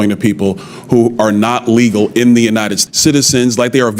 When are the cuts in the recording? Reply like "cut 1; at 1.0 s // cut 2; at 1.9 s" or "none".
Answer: cut 1; at 2.8 s

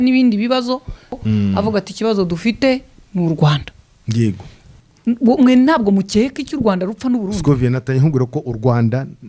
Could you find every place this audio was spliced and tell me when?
cut 1; at 1.2 s // cut 2; at 4.7 s

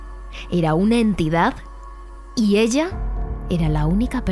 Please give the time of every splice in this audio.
none

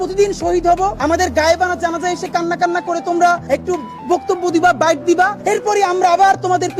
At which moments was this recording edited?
cut 1; at 1.0 s // cut 2; at 3.4 s // cut 3; at 5.4 s

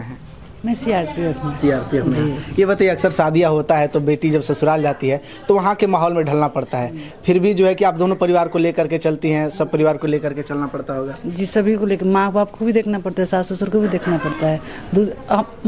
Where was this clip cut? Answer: none

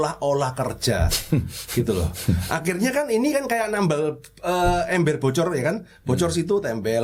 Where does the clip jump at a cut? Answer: none

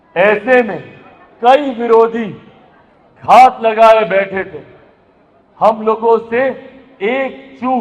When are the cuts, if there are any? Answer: none

